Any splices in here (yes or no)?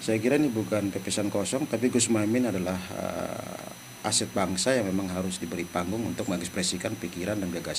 no